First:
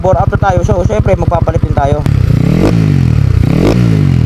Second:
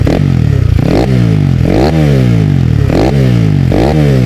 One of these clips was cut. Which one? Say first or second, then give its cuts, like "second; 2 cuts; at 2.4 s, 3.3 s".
first; 1 cut; at 2.1 s